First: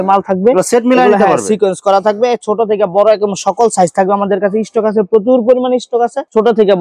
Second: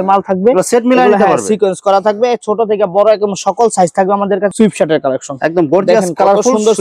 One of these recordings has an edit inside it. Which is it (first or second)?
second